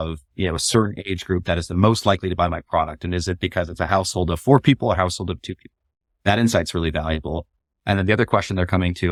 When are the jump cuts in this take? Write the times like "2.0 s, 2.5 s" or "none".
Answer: none